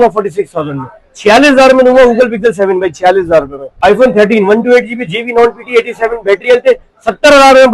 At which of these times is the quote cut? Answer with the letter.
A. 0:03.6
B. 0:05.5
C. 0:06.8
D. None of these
A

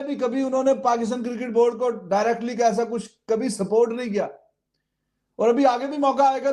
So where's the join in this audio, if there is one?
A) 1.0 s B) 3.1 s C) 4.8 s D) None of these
D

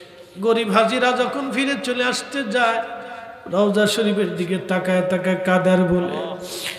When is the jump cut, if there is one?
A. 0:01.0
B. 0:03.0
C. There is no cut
C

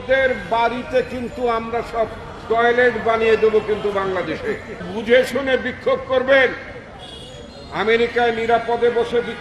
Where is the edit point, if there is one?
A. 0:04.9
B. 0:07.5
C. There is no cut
A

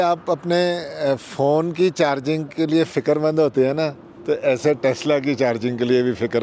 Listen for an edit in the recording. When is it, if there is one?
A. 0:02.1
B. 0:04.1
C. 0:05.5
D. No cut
D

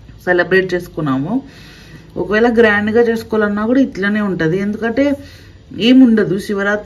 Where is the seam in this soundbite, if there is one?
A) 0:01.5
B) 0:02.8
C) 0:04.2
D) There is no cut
D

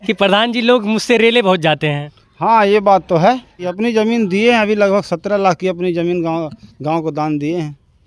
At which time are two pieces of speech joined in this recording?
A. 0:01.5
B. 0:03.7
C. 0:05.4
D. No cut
B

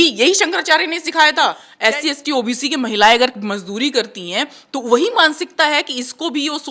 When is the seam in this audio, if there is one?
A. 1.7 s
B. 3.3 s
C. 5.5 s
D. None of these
A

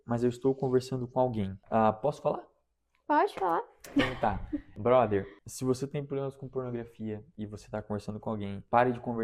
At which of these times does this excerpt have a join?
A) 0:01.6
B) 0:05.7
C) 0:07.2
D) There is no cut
D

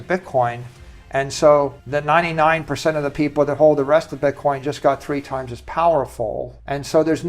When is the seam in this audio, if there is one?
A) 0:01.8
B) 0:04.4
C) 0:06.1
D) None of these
A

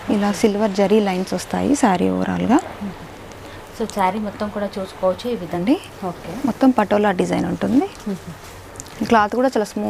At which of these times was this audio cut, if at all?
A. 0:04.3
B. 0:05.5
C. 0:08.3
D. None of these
B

